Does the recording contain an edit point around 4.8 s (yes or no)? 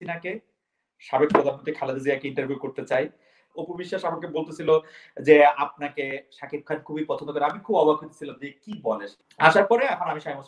no